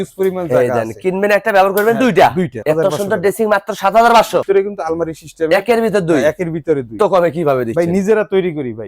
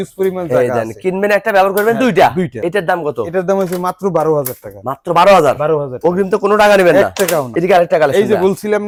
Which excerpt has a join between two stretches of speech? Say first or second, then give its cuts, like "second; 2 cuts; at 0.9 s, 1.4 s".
first; 3 cuts; at 2.5 s, 4.4 s, 7.0 s